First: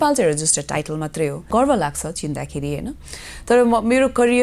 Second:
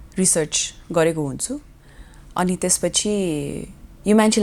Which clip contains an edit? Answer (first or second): first